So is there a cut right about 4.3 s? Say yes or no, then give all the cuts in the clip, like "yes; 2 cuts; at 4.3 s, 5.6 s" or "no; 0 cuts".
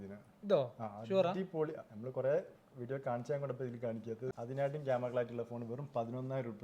yes; 1 cut; at 4.3 s